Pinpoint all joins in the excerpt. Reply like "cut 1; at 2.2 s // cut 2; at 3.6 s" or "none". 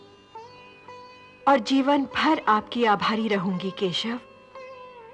none